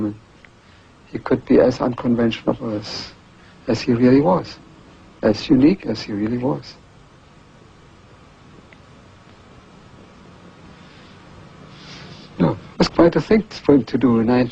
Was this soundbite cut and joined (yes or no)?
yes